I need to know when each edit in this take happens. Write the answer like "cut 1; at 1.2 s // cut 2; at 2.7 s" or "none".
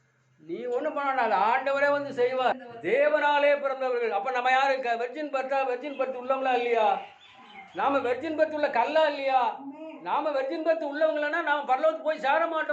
cut 1; at 2.7 s